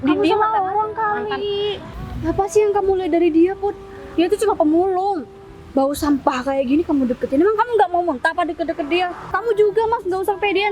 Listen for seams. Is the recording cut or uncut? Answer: cut